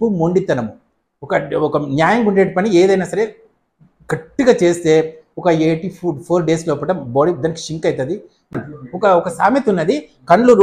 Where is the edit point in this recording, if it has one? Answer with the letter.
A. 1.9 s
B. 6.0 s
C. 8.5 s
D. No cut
C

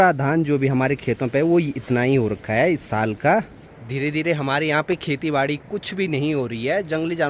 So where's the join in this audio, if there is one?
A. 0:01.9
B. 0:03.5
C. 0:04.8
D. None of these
D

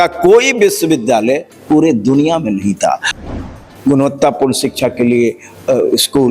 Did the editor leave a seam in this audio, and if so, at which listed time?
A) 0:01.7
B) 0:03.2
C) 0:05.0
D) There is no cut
B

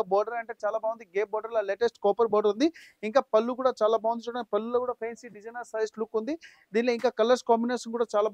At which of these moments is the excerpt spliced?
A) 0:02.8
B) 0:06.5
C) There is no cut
C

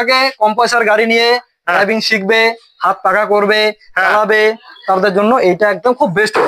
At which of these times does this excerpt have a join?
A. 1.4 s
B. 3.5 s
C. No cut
C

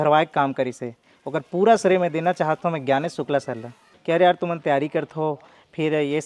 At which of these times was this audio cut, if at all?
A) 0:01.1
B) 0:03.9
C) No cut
B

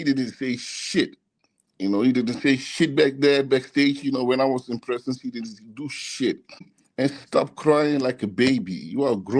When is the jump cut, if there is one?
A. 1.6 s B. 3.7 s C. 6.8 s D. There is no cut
C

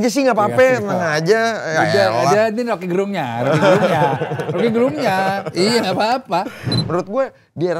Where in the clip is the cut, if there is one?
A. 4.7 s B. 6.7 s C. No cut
B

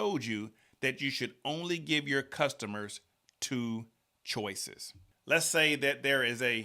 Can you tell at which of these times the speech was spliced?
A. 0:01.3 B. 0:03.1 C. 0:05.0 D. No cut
C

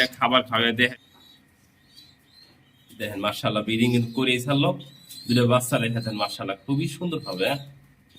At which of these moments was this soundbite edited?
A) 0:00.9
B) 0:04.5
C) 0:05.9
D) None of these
A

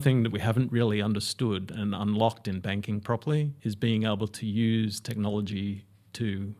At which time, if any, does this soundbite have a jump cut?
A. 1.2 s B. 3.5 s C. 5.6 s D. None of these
B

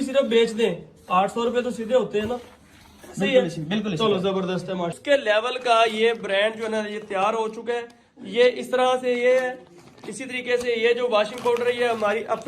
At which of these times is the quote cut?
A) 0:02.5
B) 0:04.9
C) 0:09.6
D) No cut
B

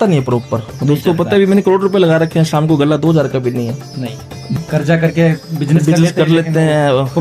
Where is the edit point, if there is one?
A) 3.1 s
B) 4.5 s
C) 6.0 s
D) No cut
B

